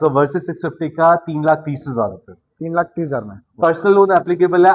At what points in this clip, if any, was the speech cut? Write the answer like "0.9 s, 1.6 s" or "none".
none